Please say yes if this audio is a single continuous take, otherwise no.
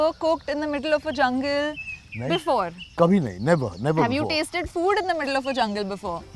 yes